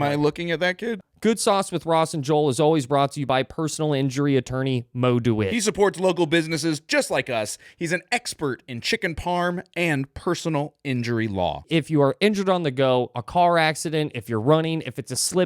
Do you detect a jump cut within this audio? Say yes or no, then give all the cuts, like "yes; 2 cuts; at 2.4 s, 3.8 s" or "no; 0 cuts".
yes; 1 cut; at 1.0 s